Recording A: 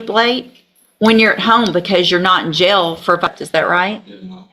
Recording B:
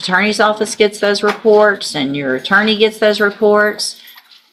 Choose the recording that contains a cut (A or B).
A